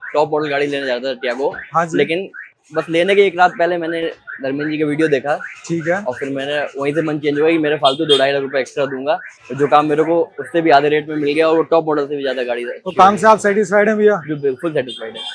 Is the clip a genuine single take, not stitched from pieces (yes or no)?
yes